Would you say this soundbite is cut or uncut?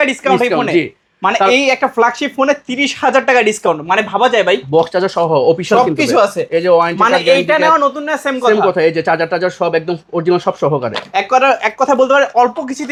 uncut